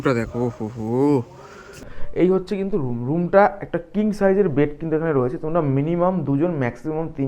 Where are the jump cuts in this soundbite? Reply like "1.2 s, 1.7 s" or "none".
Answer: 1.9 s